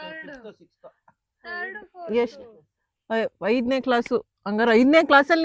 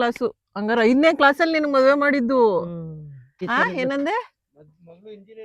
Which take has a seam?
second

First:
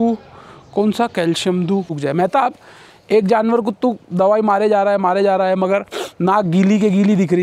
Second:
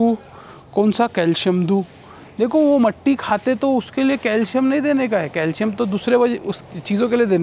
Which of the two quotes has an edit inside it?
first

